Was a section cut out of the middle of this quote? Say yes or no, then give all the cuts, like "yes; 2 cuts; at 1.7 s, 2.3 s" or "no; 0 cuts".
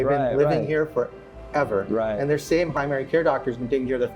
yes; 1 cut; at 2.7 s